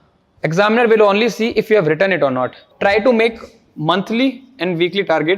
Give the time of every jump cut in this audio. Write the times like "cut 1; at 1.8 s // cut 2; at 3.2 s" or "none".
cut 1; at 2.7 s